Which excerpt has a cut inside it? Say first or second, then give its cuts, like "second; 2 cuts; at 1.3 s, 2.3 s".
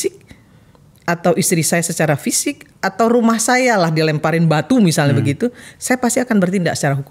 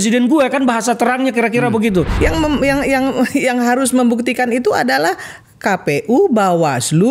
second; 1 cut; at 2.1 s